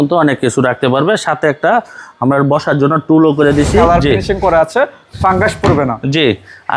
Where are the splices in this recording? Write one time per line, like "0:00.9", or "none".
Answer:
0:03.7